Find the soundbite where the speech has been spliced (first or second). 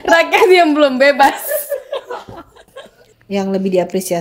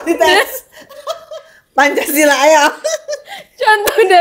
first